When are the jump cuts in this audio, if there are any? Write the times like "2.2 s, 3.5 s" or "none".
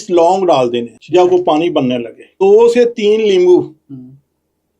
0.9 s, 2.3 s

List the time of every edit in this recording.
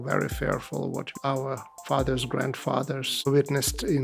1.2 s, 3.1 s

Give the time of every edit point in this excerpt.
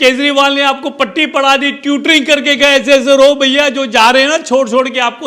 none

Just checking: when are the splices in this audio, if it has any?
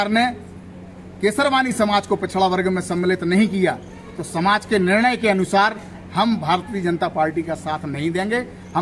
none

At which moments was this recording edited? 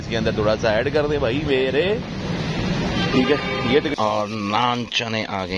3.9 s

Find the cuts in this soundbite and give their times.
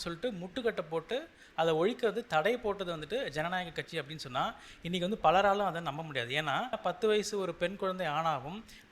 6.8 s

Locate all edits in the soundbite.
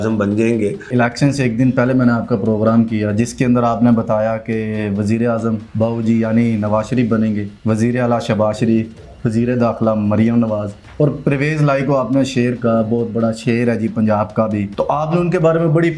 0.9 s, 5.7 s, 7.5 s, 14.7 s

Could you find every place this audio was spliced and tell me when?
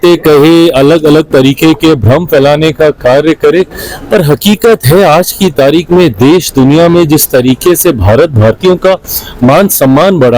none

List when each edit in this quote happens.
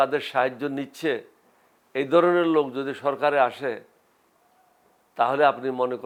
none

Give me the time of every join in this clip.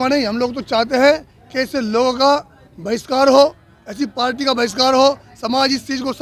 none

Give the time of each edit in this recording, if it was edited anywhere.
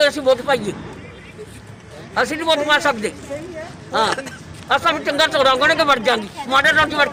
none

